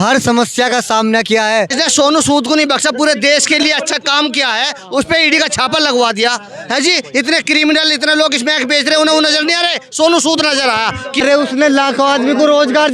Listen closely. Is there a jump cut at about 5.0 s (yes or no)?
no